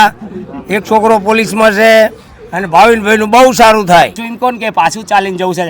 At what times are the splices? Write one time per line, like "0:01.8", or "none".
0:04.2